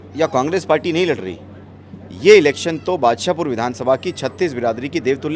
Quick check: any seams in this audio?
no; 0 cuts

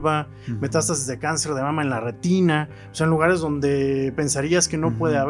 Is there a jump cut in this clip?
no; 0 cuts

